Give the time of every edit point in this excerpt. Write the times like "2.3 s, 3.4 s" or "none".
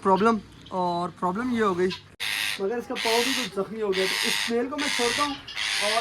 2.2 s

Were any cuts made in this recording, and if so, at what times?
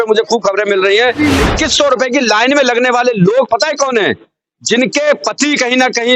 1.3 s

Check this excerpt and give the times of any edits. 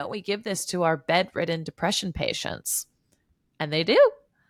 none

